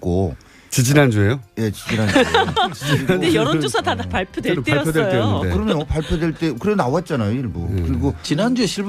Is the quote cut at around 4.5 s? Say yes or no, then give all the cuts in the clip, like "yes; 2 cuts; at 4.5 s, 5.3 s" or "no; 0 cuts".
yes; 1 cut; at 4.5 s